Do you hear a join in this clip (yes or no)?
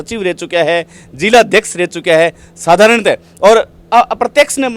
no